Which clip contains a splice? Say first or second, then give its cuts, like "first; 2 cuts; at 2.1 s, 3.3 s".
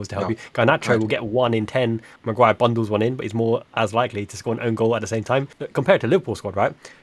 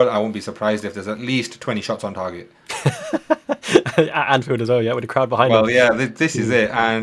first; 2 cuts; at 2.2 s, 5.6 s